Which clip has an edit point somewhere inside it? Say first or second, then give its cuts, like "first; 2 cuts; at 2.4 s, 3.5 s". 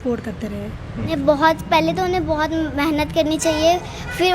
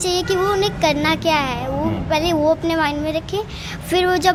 first; 1 cut; at 1.1 s